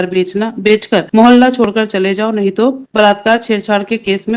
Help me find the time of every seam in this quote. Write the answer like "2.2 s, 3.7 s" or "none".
1.1 s, 2.8 s